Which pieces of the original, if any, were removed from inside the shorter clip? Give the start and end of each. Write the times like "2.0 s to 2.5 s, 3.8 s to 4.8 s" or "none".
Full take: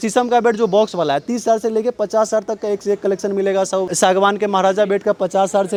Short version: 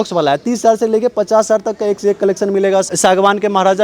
3.7 s to 3.9 s